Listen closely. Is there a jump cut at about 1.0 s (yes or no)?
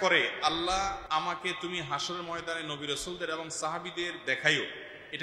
yes